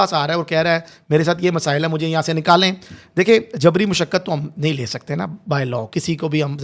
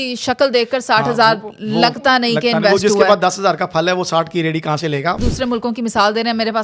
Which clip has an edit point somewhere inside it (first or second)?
second